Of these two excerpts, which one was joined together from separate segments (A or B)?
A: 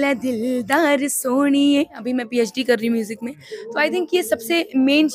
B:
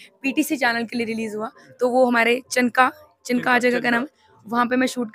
A